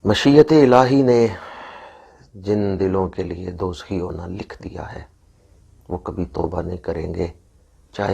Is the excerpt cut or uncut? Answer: uncut